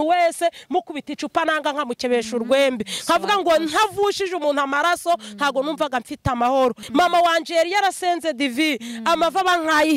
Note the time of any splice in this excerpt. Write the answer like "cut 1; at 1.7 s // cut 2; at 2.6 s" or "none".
cut 1; at 6.8 s